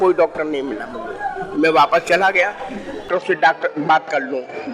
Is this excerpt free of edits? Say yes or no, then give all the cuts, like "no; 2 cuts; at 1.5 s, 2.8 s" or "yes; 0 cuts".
no; 1 cut; at 3.1 s